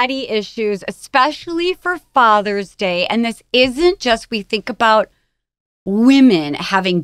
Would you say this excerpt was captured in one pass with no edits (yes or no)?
yes